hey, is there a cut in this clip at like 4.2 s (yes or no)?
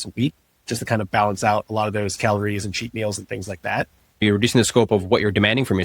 yes